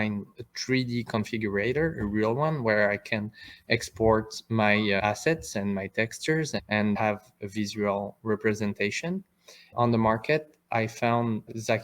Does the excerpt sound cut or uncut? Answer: cut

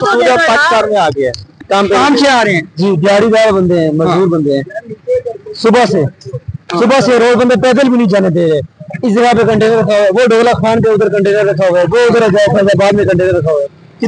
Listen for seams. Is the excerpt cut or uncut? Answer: cut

